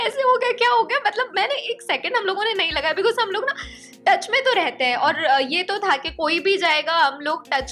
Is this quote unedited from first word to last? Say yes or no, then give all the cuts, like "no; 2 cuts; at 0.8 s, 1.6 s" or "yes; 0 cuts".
yes; 0 cuts